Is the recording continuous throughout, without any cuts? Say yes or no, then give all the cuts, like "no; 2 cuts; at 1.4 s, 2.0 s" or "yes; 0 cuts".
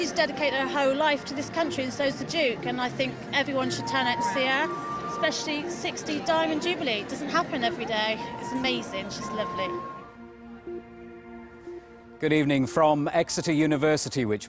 no; 1 cut; at 9.5 s